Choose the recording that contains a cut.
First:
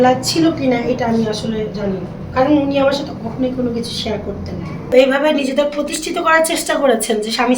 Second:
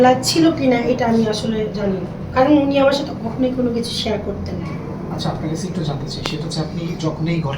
first; 1 cut; at 4.9 s

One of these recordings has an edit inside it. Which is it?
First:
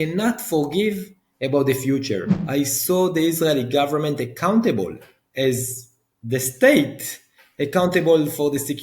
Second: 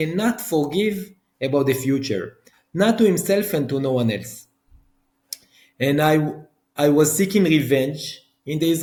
first; 1 cut; at 2.4 s

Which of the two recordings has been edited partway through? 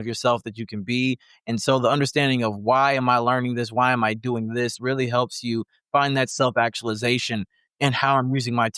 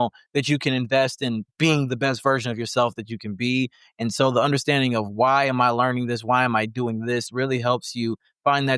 second; 1 cut; at 1.5 s

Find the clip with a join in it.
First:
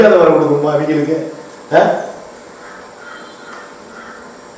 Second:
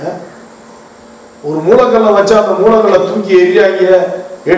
second; 1 cut; at 1.0 s

